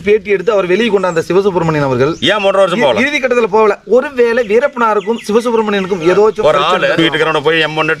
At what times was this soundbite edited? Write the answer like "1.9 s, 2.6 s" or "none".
6.4 s